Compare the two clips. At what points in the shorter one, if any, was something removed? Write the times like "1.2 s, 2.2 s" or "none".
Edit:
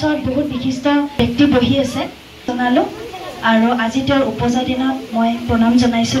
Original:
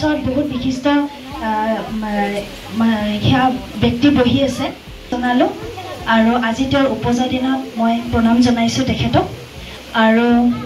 1.1 s